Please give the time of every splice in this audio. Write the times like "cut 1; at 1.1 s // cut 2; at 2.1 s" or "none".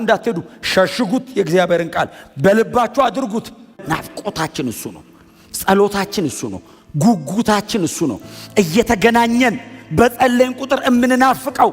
cut 1; at 3.8 s